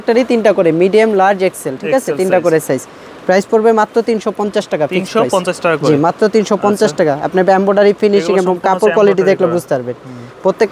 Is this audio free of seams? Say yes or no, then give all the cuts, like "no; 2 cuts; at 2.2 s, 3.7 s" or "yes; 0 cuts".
yes; 0 cuts